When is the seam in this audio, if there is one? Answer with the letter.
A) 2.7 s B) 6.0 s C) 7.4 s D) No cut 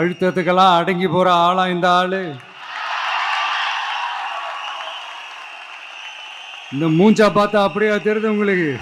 D